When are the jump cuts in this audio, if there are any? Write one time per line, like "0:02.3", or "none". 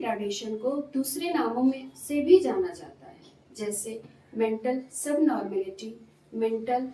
none